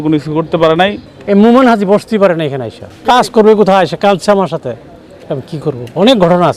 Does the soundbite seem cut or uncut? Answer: cut